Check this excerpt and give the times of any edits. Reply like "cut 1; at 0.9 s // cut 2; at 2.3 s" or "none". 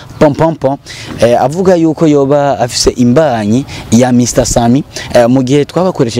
none